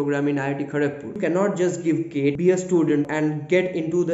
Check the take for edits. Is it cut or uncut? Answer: cut